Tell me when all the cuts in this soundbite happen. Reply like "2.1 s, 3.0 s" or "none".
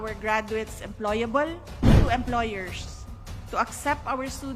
2.0 s